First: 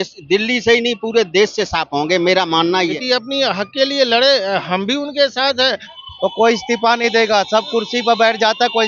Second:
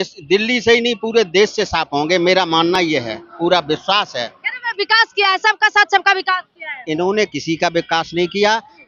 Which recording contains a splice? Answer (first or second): first